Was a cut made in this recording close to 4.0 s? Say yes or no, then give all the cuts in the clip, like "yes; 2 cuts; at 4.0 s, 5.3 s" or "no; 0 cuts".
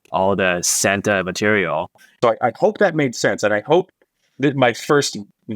no; 1 cut; at 2.0 s